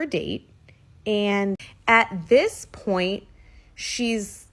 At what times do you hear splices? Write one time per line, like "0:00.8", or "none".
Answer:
0:01.7

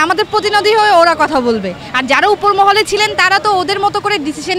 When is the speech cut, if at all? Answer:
none

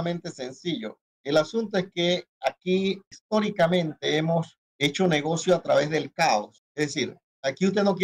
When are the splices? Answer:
0:03.1
0:04.6
0:07.0

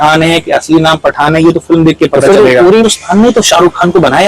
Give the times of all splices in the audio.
0:02.8

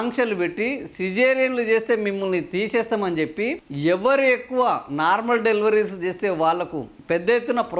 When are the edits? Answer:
none

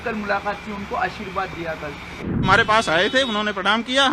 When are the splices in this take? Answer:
0:02.4

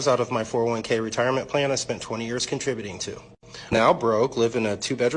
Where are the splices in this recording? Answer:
0:03.8

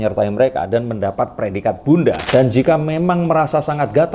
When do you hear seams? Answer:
0:02.2

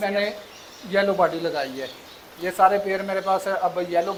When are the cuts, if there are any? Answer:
none

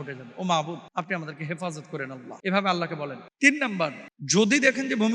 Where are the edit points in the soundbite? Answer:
0:00.8
0:02.3
0:03.2
0:04.1

